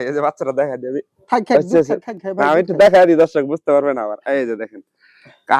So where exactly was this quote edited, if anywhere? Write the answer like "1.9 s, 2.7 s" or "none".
none